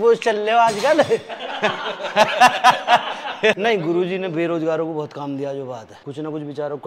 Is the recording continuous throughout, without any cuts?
no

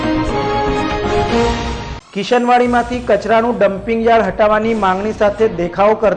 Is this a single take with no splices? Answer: no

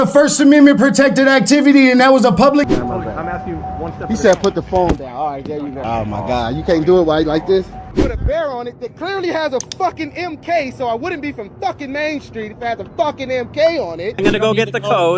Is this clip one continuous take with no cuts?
no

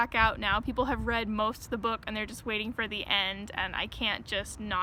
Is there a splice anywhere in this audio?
no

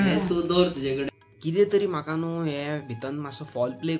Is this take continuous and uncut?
no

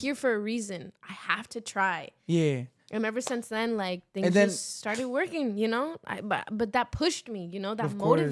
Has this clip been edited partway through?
no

